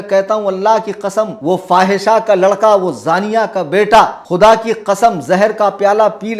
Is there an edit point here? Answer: yes; 2 cuts; at 1.3 s, 4.2 s

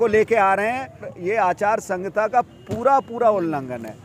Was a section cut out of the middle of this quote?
yes; 1 cut; at 1.1 s

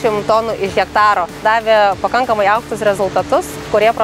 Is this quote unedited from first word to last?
no; 1 cut; at 1.4 s

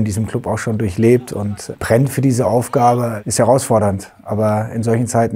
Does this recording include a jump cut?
yes; 2 cuts; at 1.6 s, 3.2 s

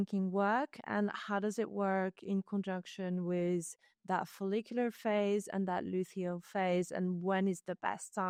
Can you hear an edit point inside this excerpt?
no; 0 cuts

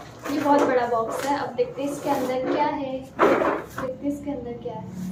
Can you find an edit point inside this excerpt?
no; 0 cuts

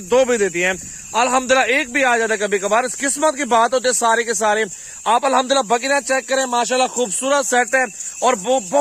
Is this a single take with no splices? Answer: yes; 0 cuts

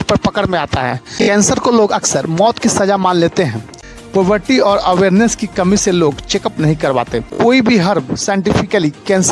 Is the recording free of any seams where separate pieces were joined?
no; 3 cuts; at 1.1 s, 3.8 s, 7.2 s

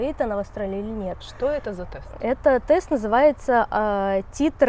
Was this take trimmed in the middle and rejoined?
no; 0 cuts

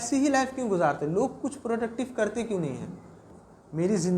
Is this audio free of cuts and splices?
no; 1 cut; at 3.3 s

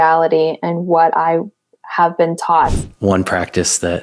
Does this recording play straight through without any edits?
no; 1 cut; at 2.8 s

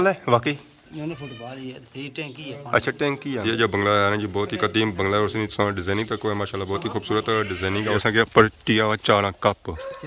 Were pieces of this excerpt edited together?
yes; 2 cuts; at 3.4 s, 8.0 s

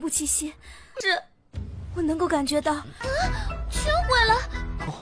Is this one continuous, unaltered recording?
yes; 0 cuts

